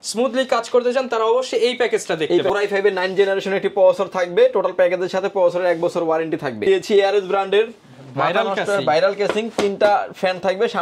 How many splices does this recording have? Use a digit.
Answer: 2